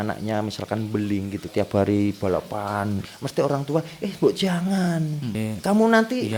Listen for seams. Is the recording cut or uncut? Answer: cut